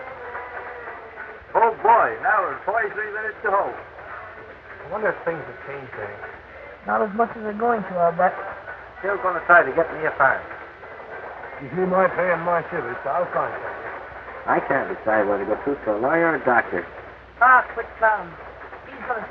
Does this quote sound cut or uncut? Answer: cut